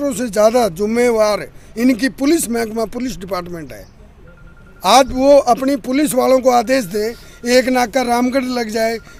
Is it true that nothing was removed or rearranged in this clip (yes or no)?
yes